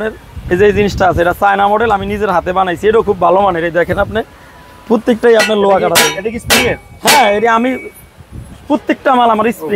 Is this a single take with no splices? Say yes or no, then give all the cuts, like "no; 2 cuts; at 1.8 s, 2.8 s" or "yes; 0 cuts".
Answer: yes; 0 cuts